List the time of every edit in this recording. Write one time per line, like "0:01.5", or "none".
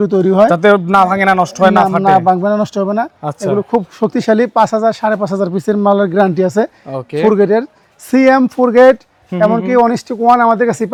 none

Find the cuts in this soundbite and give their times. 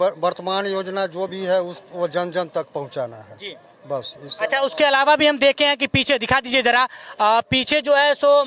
none

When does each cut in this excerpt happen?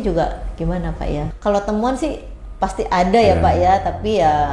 0:01.3

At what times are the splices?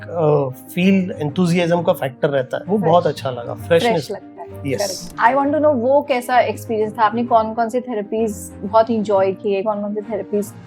0:02.6
0:05.1

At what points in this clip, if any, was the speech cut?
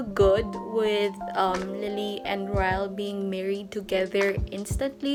none

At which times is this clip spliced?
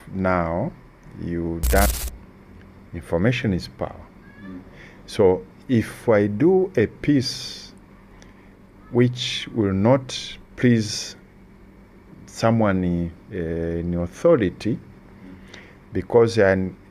0:01.9

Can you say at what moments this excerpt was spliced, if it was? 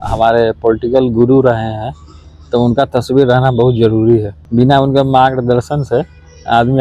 0:04.4

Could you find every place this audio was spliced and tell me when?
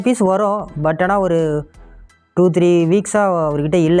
none

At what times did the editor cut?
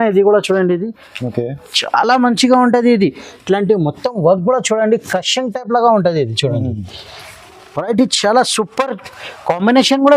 none

